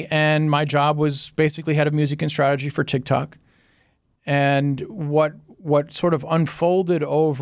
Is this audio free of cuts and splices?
yes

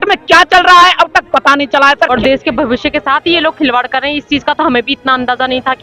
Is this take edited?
yes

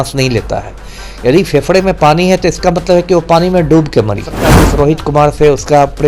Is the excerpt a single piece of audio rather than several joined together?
no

